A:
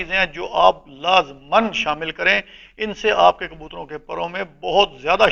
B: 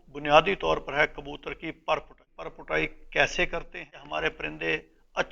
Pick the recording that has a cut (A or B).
B